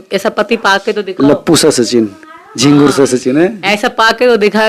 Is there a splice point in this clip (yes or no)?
no